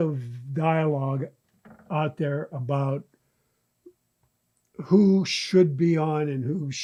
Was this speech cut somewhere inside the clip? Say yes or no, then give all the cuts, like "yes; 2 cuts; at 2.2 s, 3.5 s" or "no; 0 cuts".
no; 0 cuts